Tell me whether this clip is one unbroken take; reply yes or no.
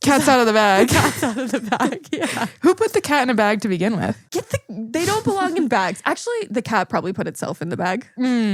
yes